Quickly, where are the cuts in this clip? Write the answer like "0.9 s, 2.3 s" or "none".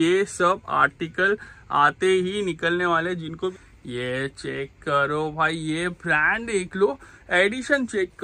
3.6 s